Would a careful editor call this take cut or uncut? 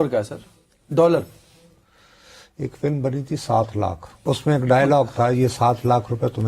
cut